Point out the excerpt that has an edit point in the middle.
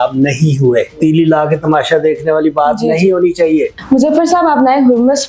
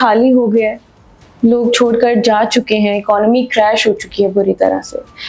first; 2 cuts; at 0.9 s, 3.7 s

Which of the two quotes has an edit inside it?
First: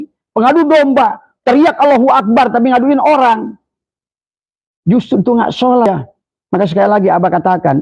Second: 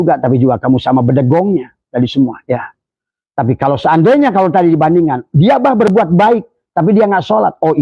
first; 1 cut; at 5.9 s

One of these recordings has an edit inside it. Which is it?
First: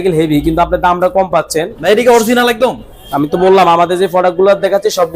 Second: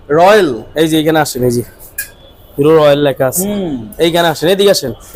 first; 1 cut; at 1.8 s

